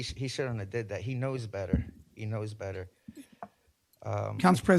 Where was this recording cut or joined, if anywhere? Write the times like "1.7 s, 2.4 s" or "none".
none